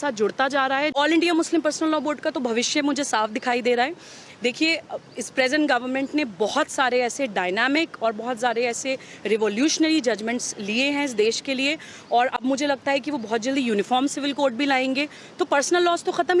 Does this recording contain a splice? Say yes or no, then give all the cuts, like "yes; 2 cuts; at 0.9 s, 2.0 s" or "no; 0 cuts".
yes; 1 cut; at 0.9 s